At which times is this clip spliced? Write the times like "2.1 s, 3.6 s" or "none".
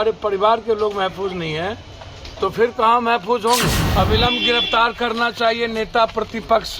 3.8 s